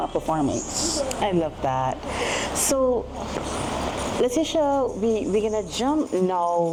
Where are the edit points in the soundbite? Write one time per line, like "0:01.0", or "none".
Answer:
none